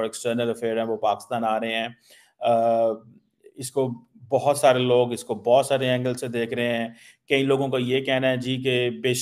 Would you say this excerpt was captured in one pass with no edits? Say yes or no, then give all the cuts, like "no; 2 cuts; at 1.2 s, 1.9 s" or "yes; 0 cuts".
yes; 0 cuts